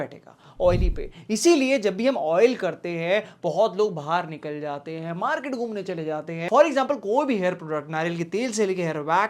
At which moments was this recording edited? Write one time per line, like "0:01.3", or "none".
0:06.4